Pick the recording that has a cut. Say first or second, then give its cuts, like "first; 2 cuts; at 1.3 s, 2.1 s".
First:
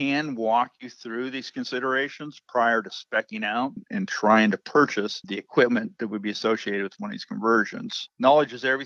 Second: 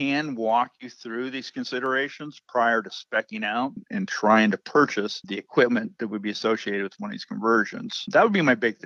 first; 1 cut; at 7.9 s